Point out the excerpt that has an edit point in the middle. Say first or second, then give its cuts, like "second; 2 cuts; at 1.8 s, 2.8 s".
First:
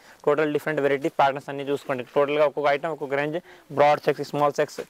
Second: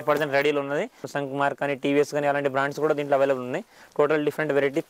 second; 1 cut; at 1.0 s